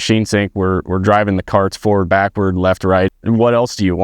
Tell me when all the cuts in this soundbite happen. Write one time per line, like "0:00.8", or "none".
0:03.1